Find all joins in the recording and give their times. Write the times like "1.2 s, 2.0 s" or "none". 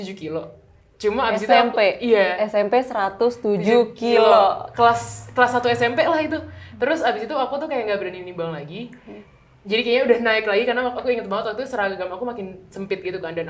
none